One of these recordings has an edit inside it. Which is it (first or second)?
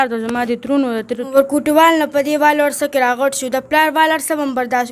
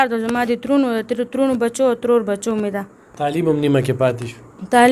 first